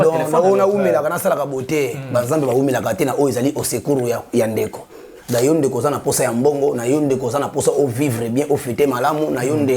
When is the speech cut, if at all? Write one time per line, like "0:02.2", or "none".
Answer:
none